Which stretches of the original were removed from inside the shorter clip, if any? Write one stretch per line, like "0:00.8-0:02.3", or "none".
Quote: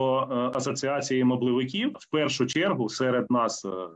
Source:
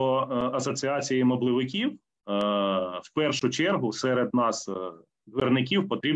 0:02.0-0:03.0